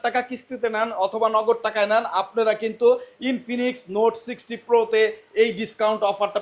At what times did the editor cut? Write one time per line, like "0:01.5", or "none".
none